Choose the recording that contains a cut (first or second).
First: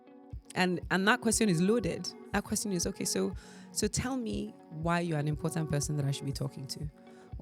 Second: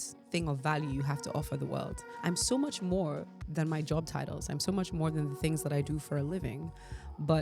second